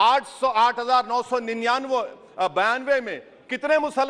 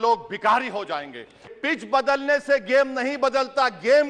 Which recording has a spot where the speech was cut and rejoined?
second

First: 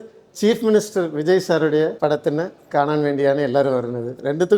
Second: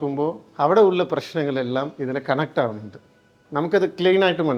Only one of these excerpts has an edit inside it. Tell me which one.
first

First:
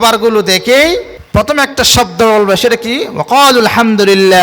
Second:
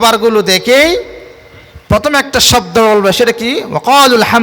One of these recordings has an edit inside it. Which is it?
first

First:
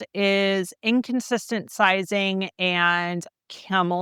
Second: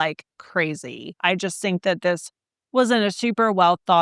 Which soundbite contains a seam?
second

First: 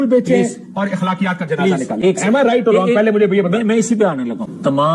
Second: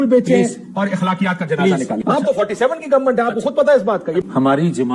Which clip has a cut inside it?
second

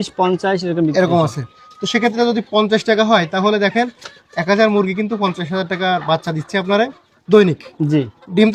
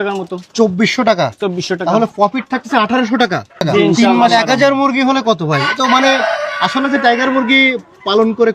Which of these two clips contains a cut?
second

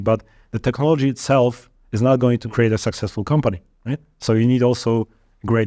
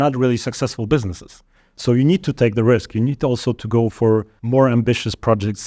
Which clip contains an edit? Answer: second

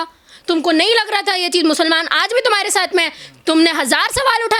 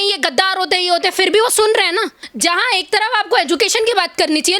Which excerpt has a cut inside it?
second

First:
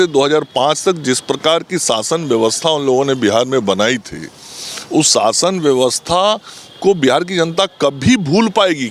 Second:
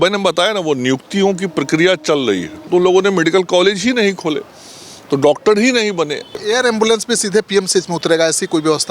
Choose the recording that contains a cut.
second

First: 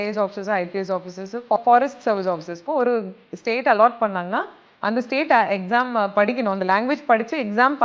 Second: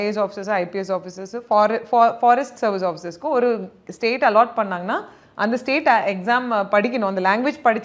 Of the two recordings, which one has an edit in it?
first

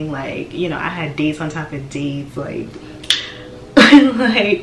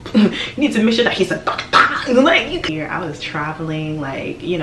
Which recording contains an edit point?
second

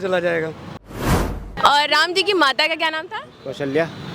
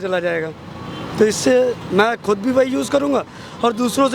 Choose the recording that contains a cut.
first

